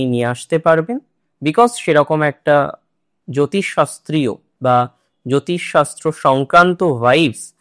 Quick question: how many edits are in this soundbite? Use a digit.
0